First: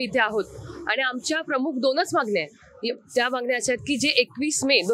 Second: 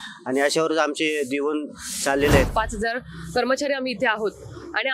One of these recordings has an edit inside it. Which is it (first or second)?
second